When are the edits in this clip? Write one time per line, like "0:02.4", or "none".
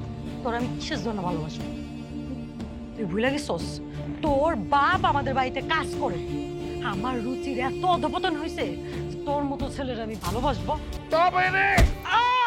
0:10.9